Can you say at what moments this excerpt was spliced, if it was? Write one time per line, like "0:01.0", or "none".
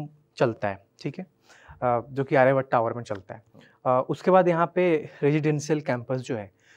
none

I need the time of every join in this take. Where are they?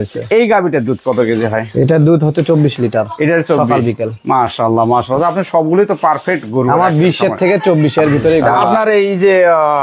0:08.7

